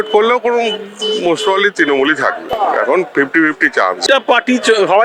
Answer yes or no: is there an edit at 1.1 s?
no